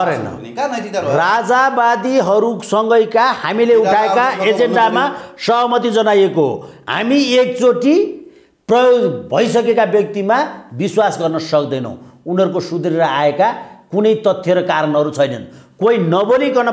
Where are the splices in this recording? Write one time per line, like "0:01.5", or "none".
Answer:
none